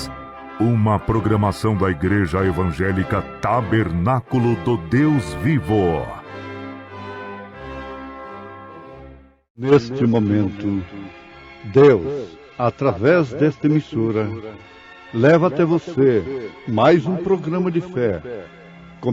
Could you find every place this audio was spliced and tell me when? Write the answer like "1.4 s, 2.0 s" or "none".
9.7 s